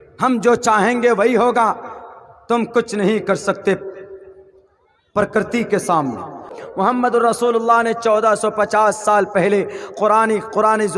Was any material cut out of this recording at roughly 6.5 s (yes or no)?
yes